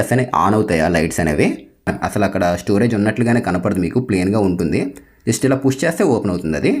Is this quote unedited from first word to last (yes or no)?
no